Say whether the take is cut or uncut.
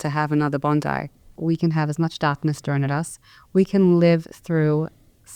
cut